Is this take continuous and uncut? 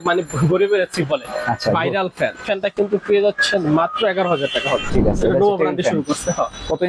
no; 2 cuts; at 2.4 s, 4.9 s

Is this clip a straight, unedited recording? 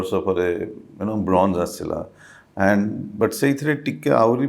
yes; 0 cuts

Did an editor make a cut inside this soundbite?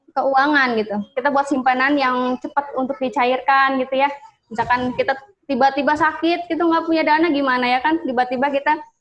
yes; 1 cut; at 1.1 s

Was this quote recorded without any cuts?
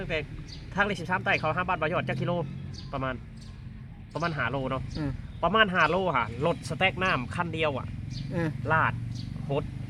yes; 0 cuts

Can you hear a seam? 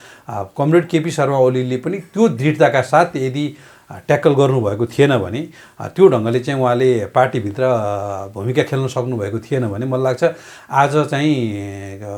no; 0 cuts

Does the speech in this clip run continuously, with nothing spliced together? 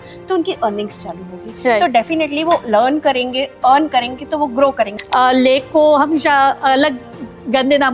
no; 1 cut; at 4.9 s

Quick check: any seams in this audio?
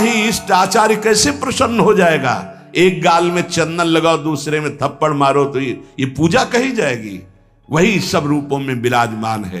no; 0 cuts

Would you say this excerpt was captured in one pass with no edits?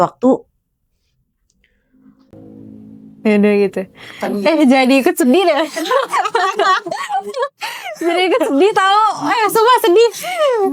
yes; 0 cuts

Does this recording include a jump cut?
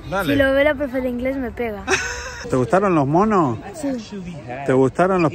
yes; 2 cuts; at 2.4 s, 3.7 s

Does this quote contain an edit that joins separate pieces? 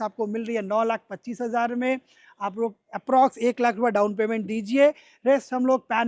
no; 0 cuts

